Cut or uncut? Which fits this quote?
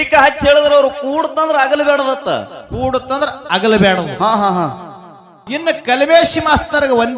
cut